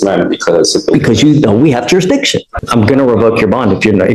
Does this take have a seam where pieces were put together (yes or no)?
yes